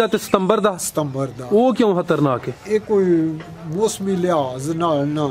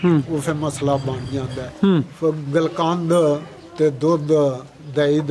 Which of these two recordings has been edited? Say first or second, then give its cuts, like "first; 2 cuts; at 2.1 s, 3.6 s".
second; 1 cut; at 1.6 s